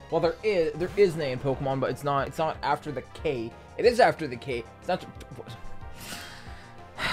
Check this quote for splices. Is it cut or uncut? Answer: cut